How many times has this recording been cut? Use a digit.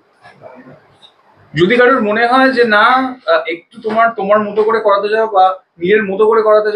0